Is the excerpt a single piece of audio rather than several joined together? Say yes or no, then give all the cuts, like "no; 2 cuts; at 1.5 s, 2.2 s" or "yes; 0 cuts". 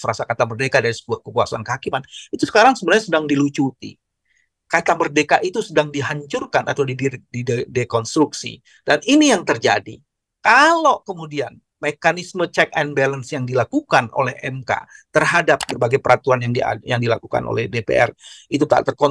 no; 1 cut; at 15.7 s